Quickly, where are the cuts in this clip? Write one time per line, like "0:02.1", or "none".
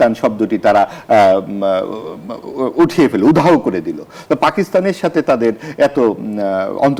none